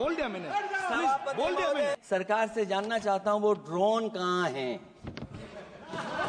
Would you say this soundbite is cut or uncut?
cut